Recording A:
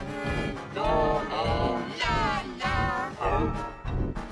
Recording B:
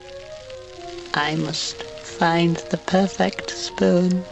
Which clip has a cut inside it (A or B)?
B